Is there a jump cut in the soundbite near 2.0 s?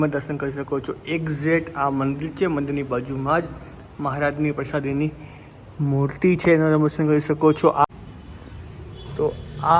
no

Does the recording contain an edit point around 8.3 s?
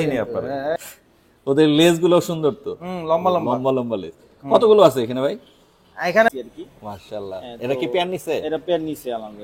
no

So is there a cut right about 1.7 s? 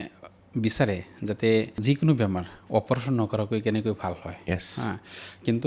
yes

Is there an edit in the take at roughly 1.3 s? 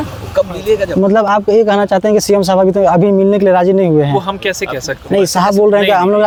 no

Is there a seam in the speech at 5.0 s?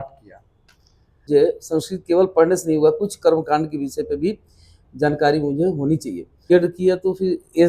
no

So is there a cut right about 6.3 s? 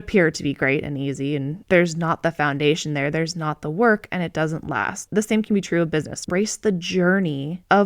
yes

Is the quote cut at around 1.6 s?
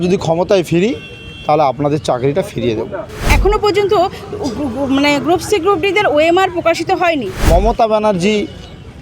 no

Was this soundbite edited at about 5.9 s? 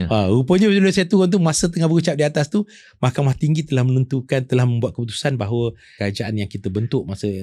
yes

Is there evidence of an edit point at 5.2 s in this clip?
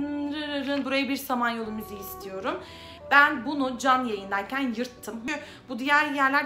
yes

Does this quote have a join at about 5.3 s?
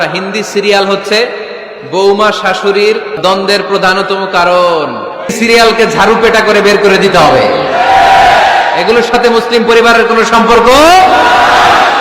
yes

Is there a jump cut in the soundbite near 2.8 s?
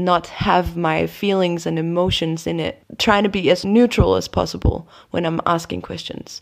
yes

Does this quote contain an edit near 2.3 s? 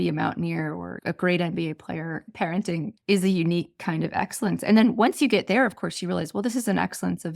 yes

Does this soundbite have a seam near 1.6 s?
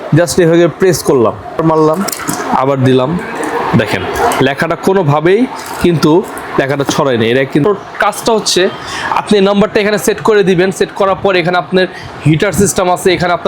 yes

